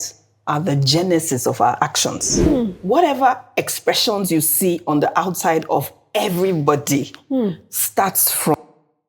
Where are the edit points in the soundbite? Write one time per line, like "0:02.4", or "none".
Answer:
0:02.5